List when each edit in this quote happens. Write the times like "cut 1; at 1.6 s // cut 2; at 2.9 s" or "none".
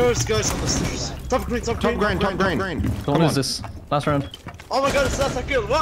cut 1; at 1.1 s